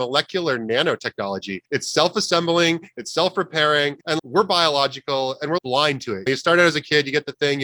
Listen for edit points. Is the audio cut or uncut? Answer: cut